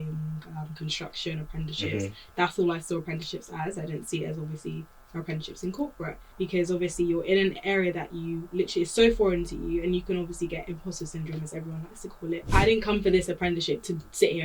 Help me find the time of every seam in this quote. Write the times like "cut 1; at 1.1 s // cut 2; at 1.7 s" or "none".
cut 1; at 6.2 s // cut 2; at 12.5 s